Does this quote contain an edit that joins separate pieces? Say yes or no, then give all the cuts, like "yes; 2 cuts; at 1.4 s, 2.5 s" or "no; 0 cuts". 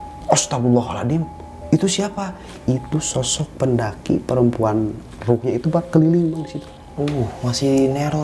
no; 0 cuts